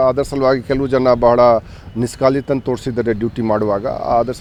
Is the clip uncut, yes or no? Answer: yes